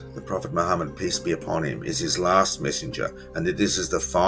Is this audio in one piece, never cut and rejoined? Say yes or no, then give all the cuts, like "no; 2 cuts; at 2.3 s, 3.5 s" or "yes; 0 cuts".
yes; 0 cuts